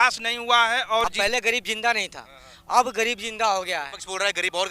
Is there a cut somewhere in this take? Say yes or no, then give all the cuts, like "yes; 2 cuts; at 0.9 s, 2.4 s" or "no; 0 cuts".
yes; 1 cut; at 1.0 s